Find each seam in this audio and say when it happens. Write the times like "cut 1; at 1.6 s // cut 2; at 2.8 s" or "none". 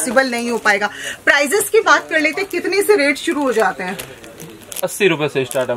none